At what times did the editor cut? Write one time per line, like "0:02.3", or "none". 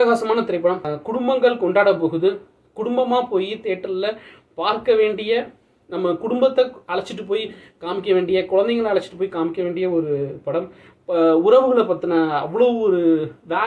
0:00.9